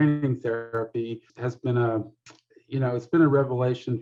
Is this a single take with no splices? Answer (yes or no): yes